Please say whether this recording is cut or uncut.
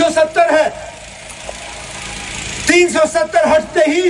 uncut